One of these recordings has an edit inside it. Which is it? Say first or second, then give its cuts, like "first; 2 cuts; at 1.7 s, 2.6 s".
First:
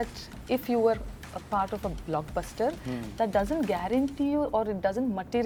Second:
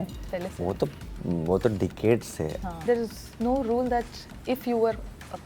second; 1 cut; at 2.8 s